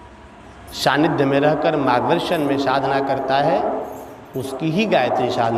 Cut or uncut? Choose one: uncut